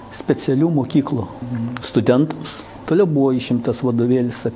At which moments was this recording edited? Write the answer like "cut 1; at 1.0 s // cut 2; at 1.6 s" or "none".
cut 1; at 2.8 s